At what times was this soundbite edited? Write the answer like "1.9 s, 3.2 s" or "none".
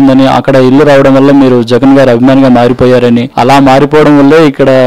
3.3 s